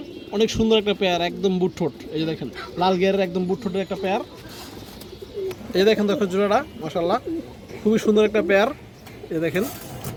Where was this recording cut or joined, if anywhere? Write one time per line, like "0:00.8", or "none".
none